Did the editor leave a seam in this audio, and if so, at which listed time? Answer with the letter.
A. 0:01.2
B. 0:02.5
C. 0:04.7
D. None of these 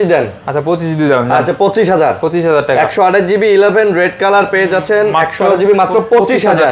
D